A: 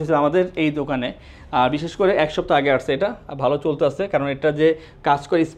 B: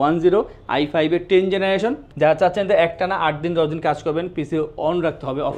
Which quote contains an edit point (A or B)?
B